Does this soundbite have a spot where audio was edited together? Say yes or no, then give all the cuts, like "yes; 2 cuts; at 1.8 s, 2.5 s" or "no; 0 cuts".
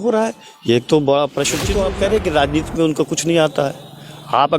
yes; 1 cut; at 1.7 s